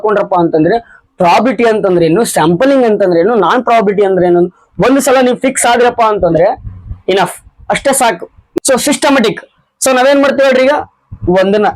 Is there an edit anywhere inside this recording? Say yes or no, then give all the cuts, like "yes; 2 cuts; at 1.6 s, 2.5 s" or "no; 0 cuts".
yes; 1 cut; at 8.4 s